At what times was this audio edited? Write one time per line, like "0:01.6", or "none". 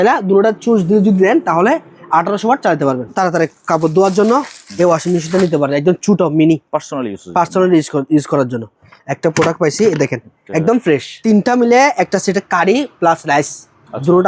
0:03.1
0:11.2